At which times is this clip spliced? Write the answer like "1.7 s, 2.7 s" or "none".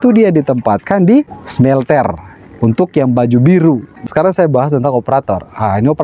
1.4 s, 4.0 s

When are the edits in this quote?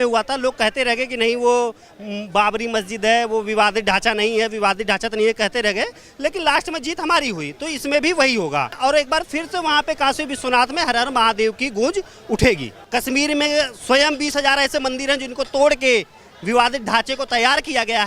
8.7 s, 12.7 s

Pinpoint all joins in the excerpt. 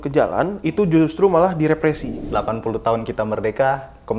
2.1 s

